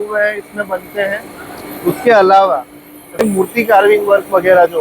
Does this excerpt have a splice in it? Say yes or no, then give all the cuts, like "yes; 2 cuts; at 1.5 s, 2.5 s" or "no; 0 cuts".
yes; 1 cut; at 3.2 s